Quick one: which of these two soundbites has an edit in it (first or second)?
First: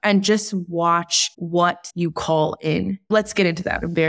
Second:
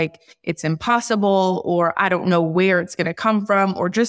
first